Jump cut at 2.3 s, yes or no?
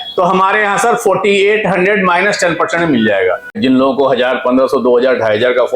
no